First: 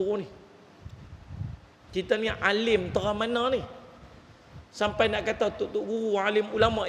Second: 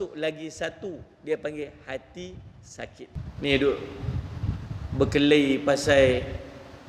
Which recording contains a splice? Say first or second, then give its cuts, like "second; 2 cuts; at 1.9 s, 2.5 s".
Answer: second; 1 cut; at 3.1 s